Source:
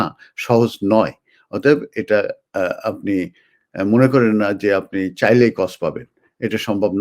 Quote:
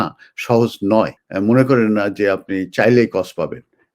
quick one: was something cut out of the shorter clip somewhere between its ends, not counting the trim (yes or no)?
yes